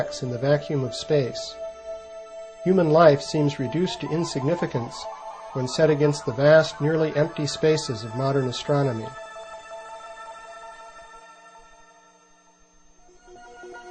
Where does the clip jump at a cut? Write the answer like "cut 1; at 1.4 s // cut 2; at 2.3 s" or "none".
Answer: cut 1; at 8.4 s